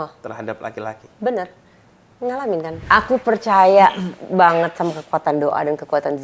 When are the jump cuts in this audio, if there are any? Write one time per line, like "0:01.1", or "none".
0:02.8